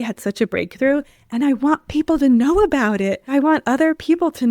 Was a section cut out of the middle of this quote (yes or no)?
yes